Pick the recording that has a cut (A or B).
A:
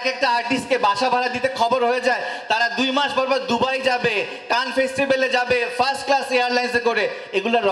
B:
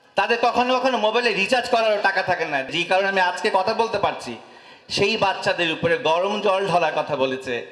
B